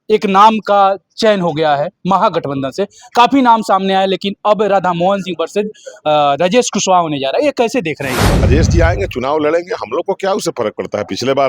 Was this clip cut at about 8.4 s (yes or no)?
yes